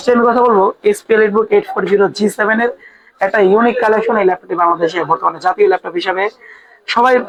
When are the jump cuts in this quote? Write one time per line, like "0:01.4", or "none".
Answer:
none